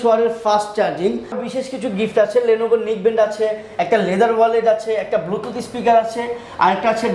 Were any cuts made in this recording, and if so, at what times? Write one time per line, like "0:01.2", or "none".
0:01.4